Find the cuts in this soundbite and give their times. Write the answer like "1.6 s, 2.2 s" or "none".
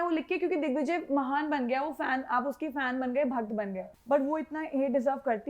3.9 s